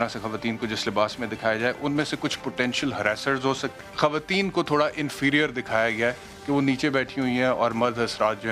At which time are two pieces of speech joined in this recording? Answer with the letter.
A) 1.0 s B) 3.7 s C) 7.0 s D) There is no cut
B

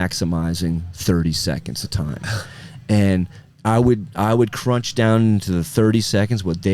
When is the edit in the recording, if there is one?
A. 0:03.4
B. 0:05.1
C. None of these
C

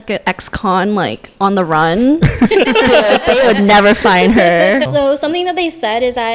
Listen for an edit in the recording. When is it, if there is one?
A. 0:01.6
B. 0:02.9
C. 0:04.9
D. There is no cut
C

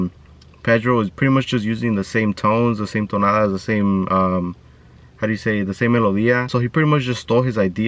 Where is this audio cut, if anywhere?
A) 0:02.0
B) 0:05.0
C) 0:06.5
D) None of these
C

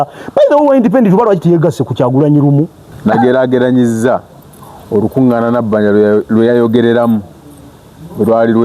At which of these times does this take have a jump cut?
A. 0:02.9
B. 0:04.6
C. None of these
A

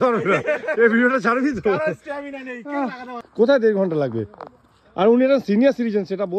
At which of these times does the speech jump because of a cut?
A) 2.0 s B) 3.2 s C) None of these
B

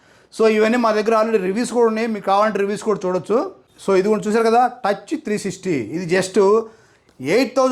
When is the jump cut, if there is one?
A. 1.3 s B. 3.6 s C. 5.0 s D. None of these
B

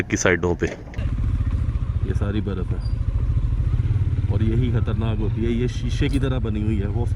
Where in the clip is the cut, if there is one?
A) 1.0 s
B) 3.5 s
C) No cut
A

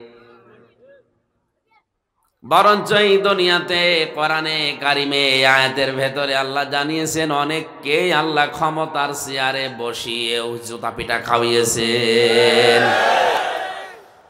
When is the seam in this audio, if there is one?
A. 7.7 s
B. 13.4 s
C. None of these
B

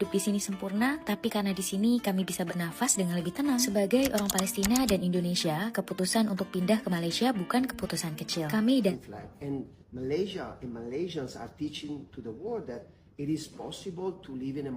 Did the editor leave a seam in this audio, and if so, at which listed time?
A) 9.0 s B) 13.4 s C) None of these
A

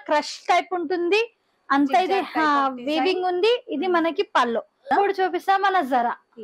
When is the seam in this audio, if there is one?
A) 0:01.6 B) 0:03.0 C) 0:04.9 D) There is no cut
C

